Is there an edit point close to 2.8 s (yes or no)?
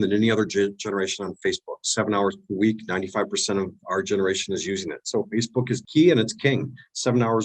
no